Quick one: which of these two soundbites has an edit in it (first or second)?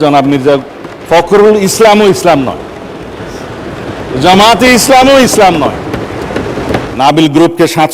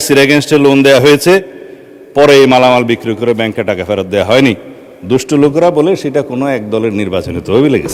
first